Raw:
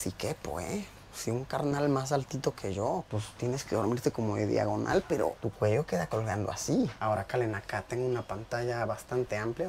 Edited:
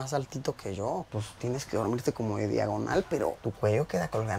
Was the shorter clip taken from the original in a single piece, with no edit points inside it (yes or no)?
yes